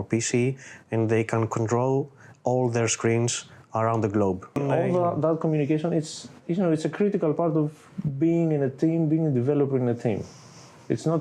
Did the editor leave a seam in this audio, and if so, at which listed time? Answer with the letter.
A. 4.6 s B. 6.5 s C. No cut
A